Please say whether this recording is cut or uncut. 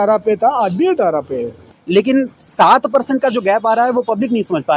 cut